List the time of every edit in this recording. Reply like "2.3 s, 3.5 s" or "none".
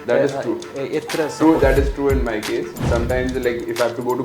2.8 s